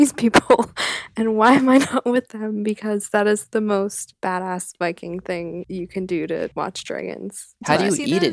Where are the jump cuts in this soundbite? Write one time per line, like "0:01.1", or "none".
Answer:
0:04.1
0:05.6
0:06.5